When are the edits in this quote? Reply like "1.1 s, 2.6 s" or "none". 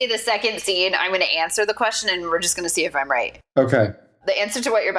none